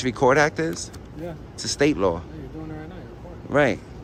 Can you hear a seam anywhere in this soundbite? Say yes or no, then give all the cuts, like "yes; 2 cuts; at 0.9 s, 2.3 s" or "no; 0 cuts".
no; 0 cuts